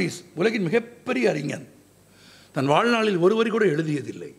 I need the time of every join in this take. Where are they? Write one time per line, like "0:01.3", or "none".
none

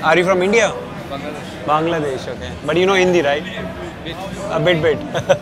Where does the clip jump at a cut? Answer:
none

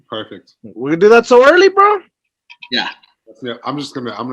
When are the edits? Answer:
0:03.2

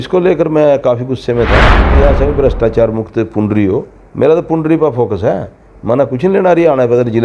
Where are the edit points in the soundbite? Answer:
0:01.9

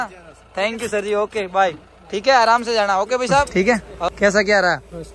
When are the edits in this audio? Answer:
0:03.5

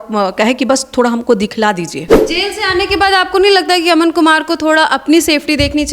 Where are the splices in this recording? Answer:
0:02.1

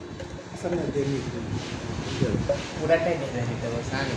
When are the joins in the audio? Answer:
none

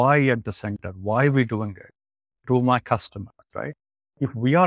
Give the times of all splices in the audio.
none

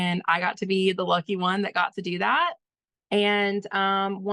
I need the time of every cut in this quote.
none

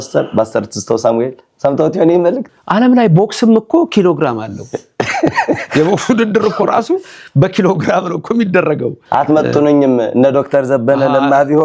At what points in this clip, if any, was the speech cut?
0:02.4
0:09.0

